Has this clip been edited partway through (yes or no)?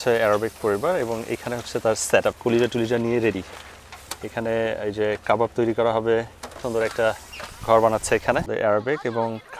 yes